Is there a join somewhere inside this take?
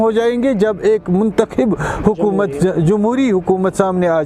no; 0 cuts

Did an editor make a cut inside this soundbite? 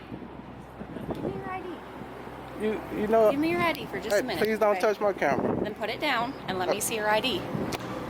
yes; 1 cut; at 5.7 s

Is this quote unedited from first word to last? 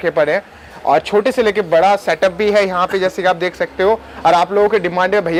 yes; 0 cuts

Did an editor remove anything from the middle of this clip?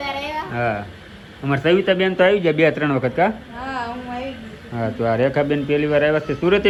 no; 0 cuts

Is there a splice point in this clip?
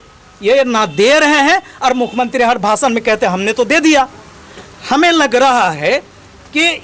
no; 0 cuts

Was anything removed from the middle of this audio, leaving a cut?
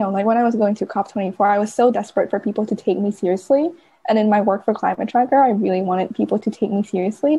no; 0 cuts

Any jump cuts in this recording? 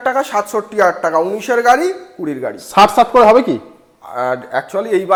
no; 0 cuts

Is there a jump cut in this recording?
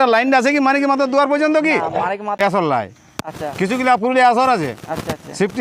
yes; 1 cut; at 2.4 s

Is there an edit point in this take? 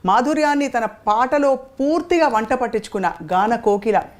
no; 0 cuts

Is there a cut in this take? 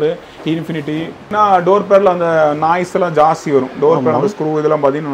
yes; 1 cut; at 1.3 s

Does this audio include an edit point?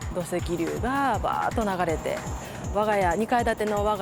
yes; 1 cut; at 2.6 s

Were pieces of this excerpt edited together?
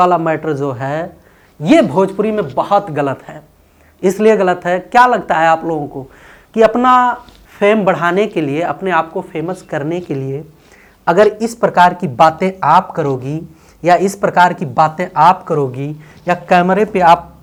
no; 0 cuts

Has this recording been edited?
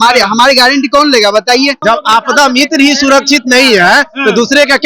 yes; 1 cut; at 1.8 s

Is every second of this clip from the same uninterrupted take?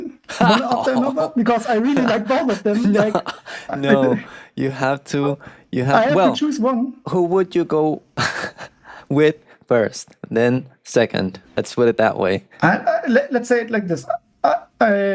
yes; 0 cuts

